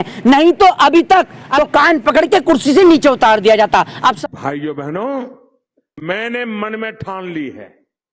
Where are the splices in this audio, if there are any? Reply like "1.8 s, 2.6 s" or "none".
1.5 s, 4.2 s

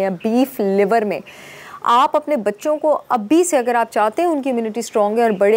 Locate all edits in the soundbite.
none

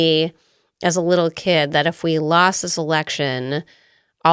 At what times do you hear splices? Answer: none

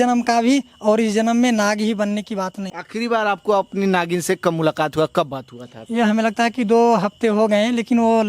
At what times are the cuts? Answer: 2.6 s, 5.7 s

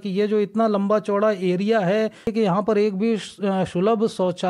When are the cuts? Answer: 2.3 s

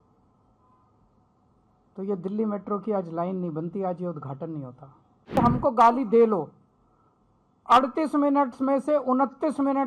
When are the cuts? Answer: 5.3 s

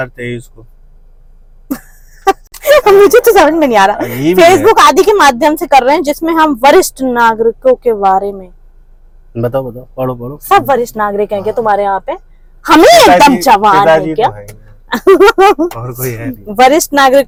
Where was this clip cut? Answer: none

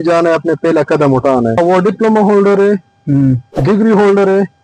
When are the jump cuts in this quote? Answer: 1.6 s

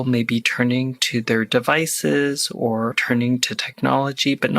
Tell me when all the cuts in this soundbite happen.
3.3 s

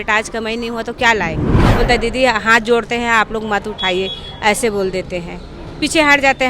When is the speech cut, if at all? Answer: 1.6 s

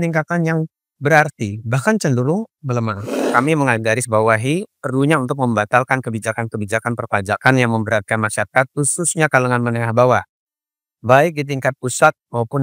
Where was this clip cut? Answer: 3.2 s

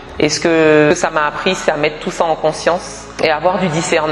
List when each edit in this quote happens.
0.9 s, 3.0 s

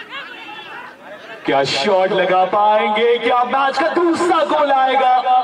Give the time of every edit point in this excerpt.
none

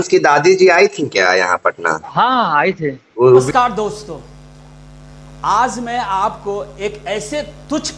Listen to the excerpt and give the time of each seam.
3.5 s

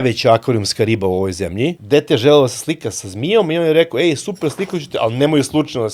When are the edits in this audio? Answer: 1.8 s

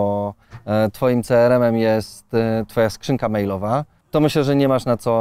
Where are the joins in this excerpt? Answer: 4.0 s

